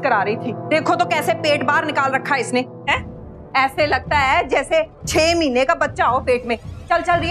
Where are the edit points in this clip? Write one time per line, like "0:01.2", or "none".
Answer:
none